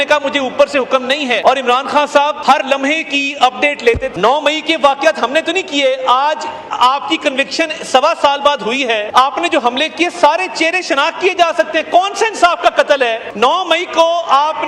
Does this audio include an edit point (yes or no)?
yes